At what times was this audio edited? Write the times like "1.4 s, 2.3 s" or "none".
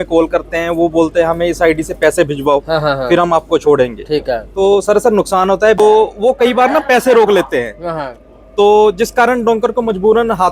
5.8 s